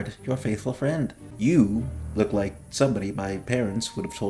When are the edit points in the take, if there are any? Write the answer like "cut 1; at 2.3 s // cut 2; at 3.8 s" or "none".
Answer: cut 1; at 1.2 s